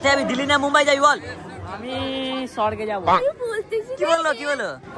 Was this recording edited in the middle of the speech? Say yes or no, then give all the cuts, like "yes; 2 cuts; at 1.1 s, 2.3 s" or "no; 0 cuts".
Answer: yes; 1 cut; at 3.1 s